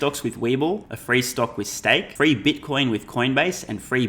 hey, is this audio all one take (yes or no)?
no